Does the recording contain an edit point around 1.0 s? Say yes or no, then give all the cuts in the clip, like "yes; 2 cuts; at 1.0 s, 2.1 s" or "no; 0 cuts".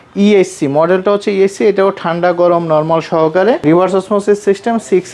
no; 1 cut; at 3.6 s